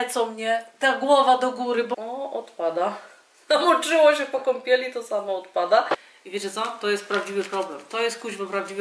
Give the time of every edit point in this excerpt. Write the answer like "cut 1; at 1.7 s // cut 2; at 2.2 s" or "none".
cut 1; at 1.9 s // cut 2; at 5.9 s